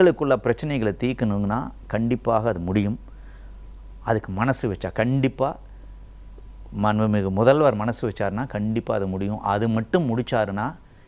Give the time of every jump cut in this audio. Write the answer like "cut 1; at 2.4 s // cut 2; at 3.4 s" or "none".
none